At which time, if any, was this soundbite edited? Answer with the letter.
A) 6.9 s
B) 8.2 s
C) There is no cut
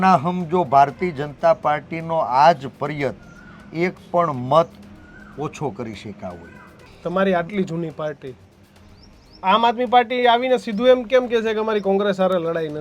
A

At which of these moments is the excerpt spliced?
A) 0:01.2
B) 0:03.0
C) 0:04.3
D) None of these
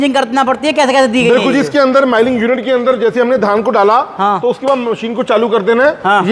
D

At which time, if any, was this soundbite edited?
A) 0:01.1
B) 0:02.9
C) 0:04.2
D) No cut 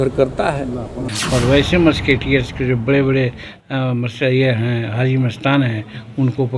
A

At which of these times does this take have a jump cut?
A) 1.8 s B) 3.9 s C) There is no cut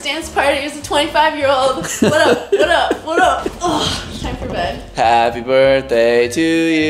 C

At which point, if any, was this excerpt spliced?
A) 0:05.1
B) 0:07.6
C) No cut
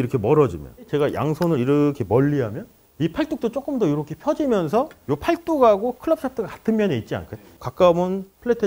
B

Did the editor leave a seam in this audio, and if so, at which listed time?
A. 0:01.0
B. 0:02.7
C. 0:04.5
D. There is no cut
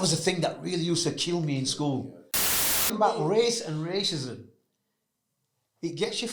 B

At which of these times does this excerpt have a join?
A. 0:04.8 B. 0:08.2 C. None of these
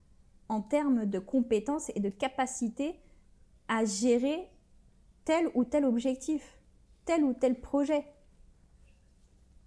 C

